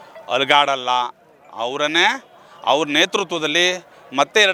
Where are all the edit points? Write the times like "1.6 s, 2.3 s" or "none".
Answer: none